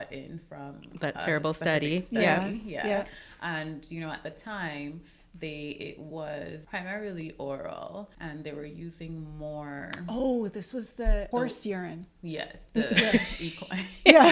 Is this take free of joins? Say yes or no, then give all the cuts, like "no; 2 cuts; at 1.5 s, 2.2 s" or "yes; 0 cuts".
no; 3 cuts; at 6.6 s, 8.1 s, 11.3 s